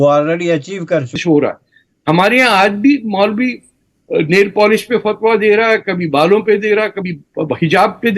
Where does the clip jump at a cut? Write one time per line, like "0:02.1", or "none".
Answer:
0:01.2